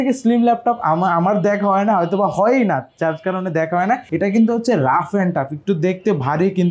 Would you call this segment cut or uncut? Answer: cut